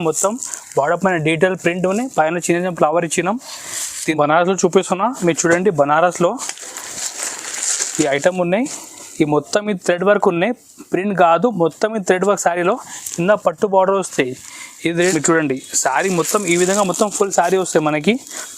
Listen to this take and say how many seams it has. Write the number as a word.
two